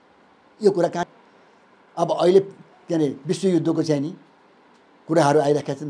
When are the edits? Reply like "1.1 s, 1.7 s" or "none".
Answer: 1.1 s